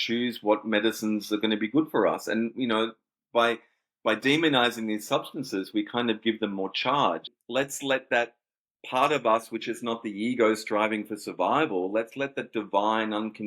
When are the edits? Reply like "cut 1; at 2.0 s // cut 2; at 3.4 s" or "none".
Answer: cut 1; at 7.3 s